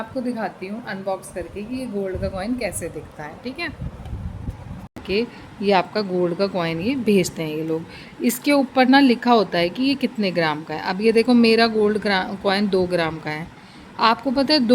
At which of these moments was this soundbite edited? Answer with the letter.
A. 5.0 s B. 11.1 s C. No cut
A